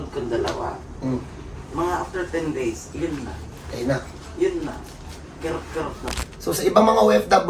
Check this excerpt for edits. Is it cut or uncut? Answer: cut